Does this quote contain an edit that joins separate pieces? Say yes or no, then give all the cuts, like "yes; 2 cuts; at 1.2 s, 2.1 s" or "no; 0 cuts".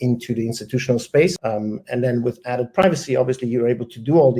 yes; 1 cut; at 1.4 s